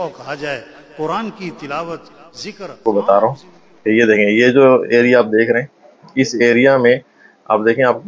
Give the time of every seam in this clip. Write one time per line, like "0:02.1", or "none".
0:02.8